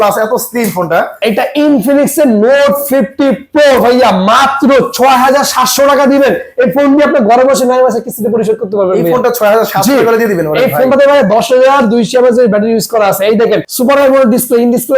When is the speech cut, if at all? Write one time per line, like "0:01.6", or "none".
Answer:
0:01.2
0:13.7